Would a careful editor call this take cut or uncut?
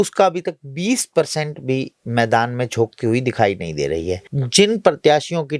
cut